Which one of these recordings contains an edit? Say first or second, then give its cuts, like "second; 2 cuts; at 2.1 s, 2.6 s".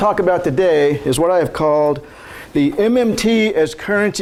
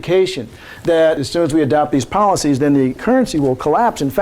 second; 2 cuts; at 1.2 s, 3.0 s